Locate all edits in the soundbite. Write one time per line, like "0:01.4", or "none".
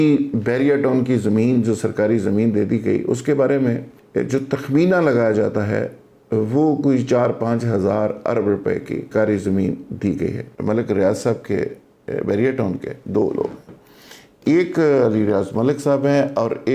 0:03.9
0:09.0
0:10.5